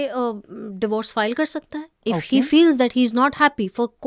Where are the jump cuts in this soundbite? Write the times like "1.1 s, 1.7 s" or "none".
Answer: none